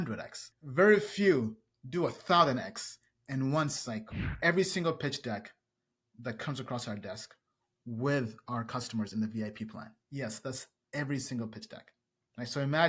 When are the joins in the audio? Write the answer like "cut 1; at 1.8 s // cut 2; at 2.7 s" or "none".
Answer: cut 1; at 4.3 s